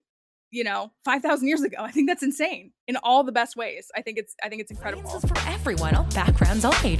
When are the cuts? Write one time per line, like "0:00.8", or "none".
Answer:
0:05.2